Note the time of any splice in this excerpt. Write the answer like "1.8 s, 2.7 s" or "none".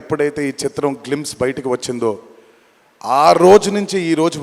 none